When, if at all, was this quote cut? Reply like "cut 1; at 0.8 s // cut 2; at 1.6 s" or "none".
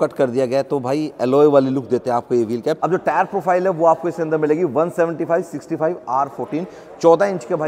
none